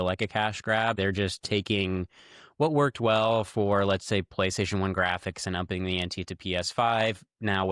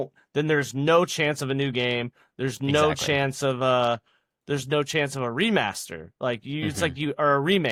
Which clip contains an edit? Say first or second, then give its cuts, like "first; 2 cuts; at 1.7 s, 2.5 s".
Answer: first; 1 cut; at 1.0 s